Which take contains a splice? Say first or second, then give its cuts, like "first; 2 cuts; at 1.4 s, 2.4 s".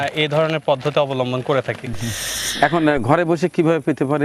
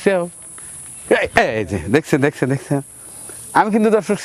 first; 1 cut; at 2.3 s